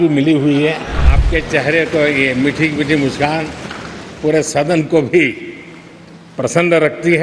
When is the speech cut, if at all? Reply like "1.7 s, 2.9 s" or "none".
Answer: 1.1 s